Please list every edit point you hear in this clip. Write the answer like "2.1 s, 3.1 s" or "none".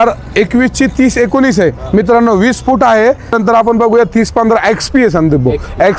3.3 s